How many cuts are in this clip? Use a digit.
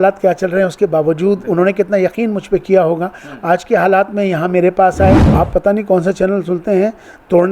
1